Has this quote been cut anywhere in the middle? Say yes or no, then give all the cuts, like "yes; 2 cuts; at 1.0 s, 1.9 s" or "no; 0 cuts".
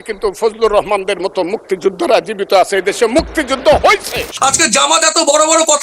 yes; 1 cut; at 4.2 s